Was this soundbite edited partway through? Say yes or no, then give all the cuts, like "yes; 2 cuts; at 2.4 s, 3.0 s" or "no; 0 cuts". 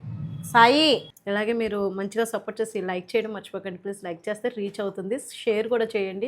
yes; 1 cut; at 1.1 s